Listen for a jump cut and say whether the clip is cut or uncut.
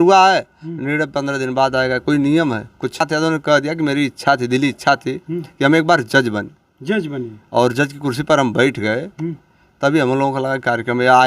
cut